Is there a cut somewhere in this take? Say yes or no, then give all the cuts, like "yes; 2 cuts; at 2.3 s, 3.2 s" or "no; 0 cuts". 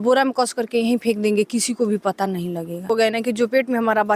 yes; 1 cut; at 2.9 s